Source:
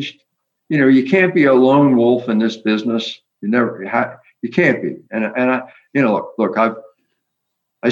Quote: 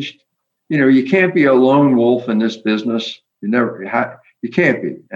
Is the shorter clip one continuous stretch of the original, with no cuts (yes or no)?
yes